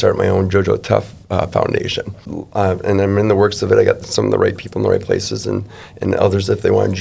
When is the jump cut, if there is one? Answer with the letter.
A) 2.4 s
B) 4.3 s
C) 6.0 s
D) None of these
A